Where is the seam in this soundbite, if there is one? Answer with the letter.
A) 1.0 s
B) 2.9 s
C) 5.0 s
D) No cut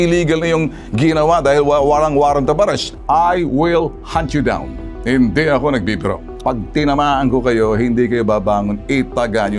B